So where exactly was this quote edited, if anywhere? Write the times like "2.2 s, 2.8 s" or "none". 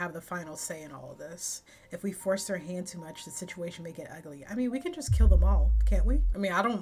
none